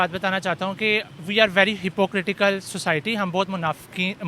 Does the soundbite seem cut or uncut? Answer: uncut